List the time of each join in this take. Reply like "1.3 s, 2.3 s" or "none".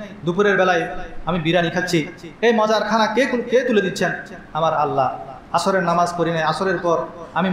none